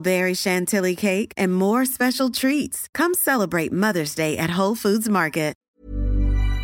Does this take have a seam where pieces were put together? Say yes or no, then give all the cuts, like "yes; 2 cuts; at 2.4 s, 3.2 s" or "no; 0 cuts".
yes; 1 cut; at 5.6 s